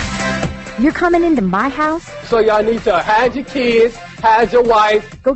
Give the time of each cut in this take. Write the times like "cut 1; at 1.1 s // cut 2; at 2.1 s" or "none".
none